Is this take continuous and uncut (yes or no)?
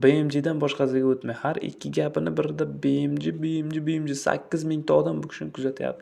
yes